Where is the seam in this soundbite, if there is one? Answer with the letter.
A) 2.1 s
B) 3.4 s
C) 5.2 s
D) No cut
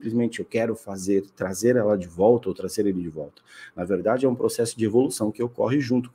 D